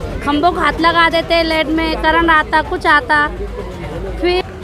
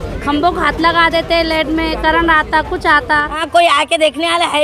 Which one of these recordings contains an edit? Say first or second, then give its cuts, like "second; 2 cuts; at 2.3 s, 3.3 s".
second; 1 cut; at 3.4 s